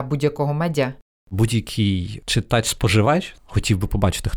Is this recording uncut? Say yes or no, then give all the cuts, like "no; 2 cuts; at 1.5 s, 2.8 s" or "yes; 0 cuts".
no; 3 cuts; at 1.3 s, 2.2 s, 3.3 s